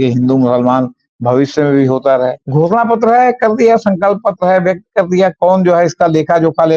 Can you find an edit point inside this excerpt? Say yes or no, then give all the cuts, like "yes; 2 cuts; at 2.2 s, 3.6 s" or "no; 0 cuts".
yes; 1 cut; at 2.4 s